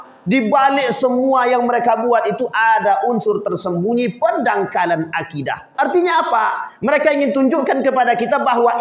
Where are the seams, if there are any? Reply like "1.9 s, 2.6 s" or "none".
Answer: 5.8 s